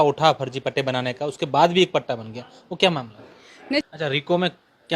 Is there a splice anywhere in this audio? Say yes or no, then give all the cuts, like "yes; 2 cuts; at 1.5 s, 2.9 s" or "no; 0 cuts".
yes; 1 cut; at 3.8 s